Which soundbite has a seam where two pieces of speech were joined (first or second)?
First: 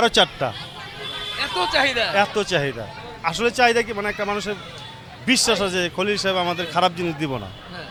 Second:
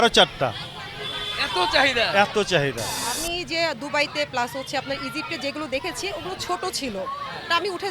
second